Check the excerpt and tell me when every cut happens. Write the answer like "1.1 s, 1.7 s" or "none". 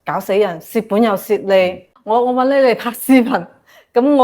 1.9 s